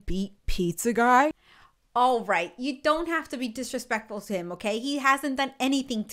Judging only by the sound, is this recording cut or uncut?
uncut